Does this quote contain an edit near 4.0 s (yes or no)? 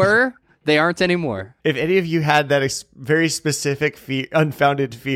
no